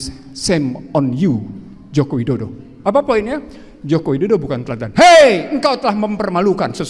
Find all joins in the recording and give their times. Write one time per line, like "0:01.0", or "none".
0:02.7